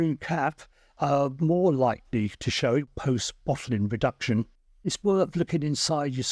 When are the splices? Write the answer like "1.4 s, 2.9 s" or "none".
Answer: 2.9 s, 4.9 s

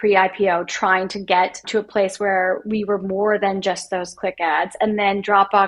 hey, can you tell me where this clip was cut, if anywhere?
1.6 s

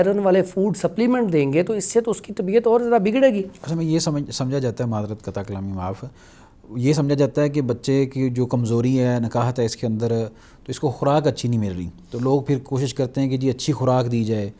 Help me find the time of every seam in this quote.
none

